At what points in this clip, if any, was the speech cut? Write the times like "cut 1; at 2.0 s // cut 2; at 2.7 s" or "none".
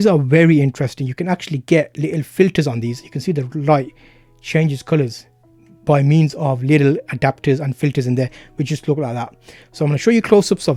none